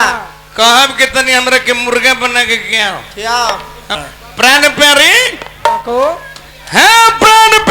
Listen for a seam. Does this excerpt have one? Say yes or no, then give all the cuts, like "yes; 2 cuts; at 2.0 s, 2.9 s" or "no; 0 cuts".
yes; 1 cut; at 4.0 s